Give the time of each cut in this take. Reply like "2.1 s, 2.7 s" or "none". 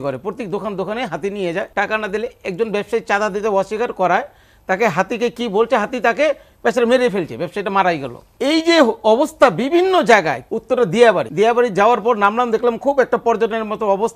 1.7 s, 8.2 s, 10.4 s, 11.3 s